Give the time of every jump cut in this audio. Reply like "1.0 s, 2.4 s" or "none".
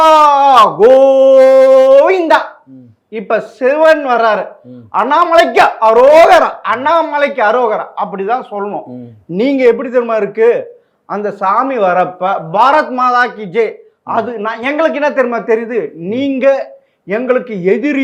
none

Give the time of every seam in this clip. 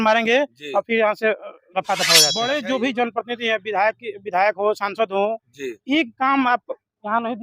2.3 s

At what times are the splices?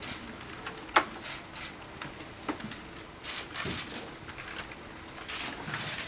none

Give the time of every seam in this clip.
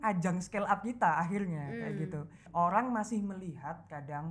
2.4 s

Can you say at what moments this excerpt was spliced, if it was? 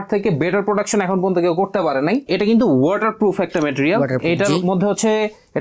2.2 s

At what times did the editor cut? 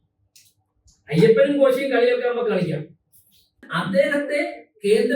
3.7 s

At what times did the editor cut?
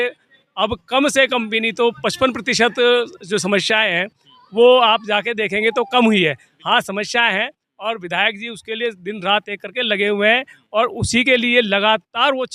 none

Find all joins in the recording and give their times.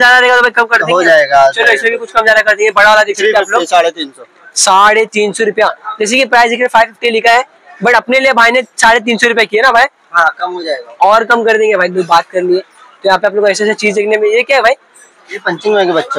none

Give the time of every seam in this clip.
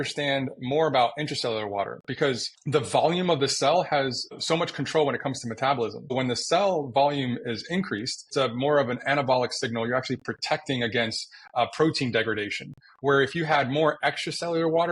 2.5 s, 4.3 s, 6.1 s, 8.2 s

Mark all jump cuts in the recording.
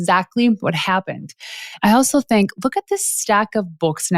1.8 s

